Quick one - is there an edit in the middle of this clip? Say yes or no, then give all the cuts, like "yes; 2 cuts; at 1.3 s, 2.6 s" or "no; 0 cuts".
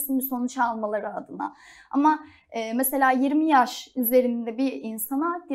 no; 0 cuts